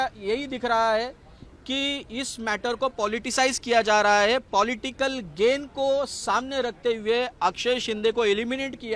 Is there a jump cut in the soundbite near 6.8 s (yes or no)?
no